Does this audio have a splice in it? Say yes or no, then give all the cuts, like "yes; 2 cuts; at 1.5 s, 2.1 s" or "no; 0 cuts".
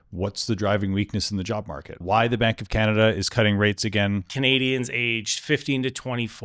yes; 2 cuts; at 2.0 s, 4.3 s